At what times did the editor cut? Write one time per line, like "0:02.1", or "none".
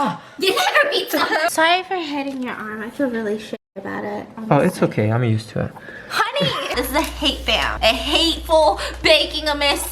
0:01.5
0:06.7